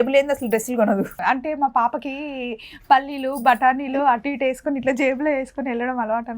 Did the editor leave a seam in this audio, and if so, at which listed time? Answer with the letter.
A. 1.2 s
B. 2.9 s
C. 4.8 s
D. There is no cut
A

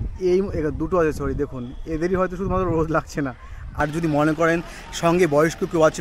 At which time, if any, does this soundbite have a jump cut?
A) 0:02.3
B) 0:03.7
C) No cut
B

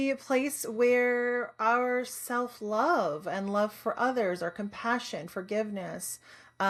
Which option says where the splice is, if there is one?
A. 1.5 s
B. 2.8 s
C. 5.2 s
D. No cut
D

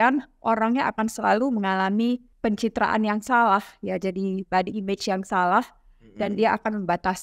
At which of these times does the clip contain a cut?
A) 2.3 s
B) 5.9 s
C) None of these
A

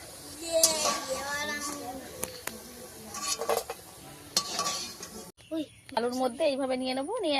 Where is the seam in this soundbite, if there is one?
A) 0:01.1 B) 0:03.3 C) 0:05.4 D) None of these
C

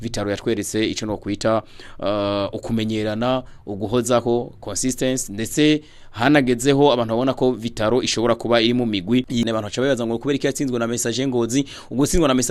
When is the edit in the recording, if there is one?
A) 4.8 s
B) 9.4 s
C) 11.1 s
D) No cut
B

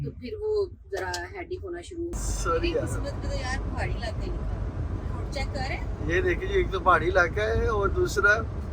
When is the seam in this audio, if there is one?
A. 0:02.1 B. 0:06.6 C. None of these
A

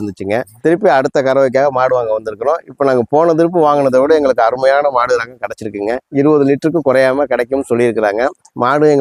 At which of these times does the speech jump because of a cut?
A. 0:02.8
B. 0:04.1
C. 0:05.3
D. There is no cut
D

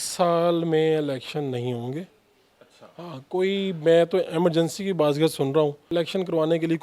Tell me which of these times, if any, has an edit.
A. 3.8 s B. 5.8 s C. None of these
B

